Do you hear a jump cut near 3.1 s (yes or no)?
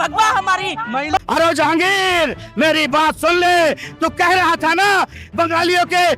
no